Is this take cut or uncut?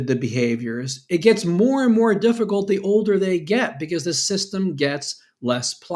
uncut